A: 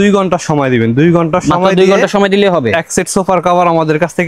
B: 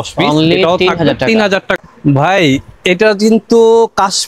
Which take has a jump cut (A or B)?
B